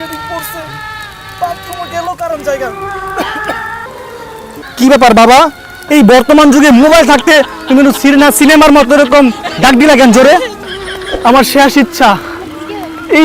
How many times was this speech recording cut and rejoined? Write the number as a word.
two